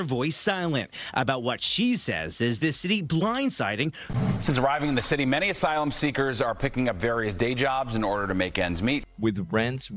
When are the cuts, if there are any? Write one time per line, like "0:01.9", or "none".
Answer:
none